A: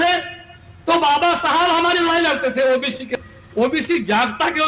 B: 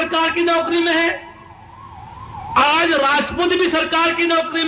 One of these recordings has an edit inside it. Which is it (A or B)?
A